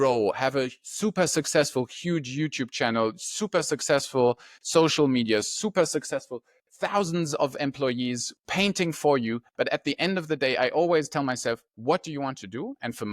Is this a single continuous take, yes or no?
yes